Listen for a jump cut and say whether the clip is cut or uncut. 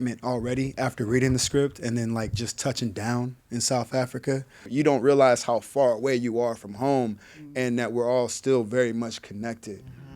cut